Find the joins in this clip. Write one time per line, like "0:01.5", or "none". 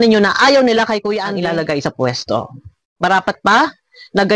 0:01.2